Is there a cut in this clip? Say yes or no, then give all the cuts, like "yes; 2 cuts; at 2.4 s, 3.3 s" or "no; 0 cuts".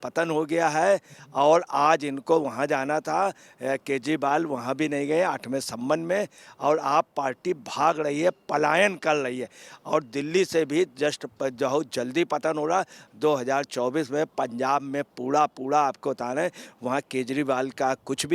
no; 0 cuts